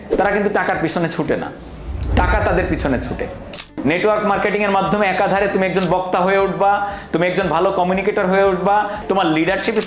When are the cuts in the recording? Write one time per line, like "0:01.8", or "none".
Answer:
0:03.6
0:09.0